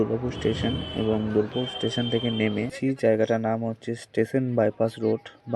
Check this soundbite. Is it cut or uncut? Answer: cut